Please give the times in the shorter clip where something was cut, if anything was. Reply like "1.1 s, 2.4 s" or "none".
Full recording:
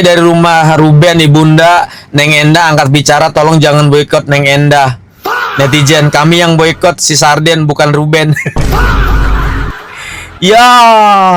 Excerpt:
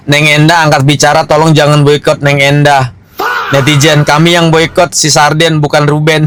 none